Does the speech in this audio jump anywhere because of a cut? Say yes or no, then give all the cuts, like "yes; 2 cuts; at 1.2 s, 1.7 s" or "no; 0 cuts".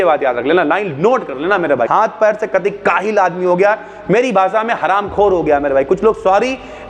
yes; 1 cut; at 1.9 s